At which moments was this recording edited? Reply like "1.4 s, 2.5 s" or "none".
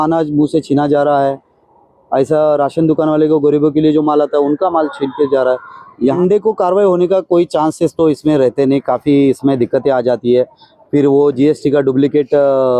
6.2 s